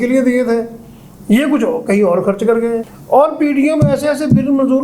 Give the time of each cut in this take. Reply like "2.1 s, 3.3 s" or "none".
2.9 s